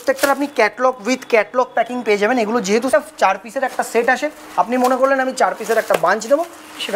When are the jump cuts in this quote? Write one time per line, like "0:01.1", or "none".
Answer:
0:02.9